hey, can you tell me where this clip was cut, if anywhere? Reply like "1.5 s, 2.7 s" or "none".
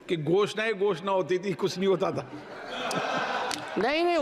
none